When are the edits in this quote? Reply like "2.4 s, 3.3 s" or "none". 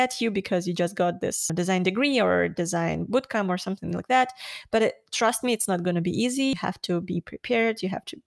1.5 s, 6.5 s